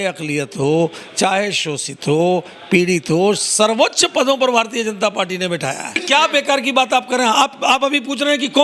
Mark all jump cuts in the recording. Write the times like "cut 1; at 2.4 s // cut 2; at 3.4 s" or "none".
cut 1; at 6.0 s